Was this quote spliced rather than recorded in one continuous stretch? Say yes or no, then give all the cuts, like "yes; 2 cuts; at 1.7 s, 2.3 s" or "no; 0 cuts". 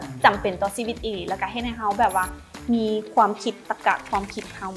no; 0 cuts